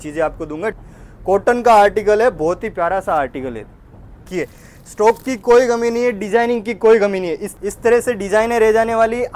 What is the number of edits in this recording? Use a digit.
3